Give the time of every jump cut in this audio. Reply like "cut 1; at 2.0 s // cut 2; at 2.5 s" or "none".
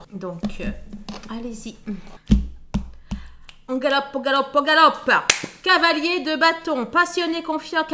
cut 1; at 2.1 s